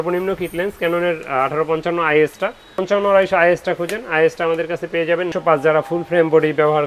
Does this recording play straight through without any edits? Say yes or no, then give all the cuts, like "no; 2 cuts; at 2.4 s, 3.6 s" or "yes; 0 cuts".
no; 2 cuts; at 2.8 s, 5.3 s